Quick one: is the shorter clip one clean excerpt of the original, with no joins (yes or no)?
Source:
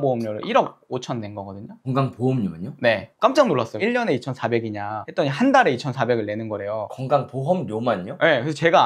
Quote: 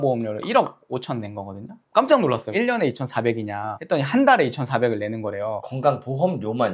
no